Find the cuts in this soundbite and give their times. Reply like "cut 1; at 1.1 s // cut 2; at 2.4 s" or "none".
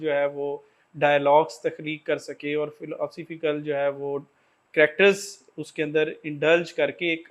none